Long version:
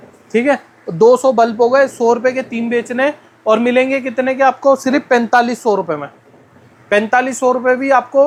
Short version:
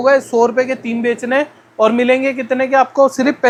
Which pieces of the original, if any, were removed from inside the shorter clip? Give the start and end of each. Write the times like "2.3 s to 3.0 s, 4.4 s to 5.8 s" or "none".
none